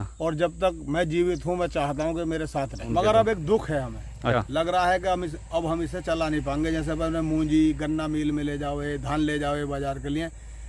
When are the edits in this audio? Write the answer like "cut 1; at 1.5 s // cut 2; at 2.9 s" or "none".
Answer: cut 1; at 2.8 s // cut 2; at 4.3 s